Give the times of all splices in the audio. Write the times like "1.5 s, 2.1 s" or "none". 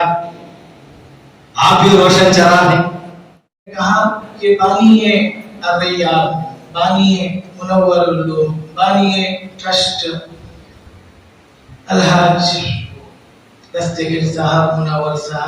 3.8 s